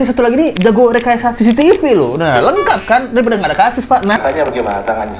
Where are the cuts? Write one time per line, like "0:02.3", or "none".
0:04.2